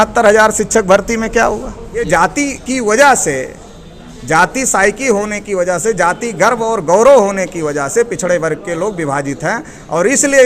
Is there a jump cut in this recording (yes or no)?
yes